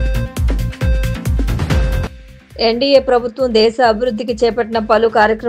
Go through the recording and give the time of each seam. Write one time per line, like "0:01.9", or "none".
0:02.0